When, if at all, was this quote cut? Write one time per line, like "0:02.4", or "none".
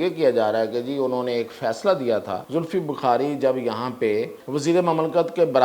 0:02.4
0:04.4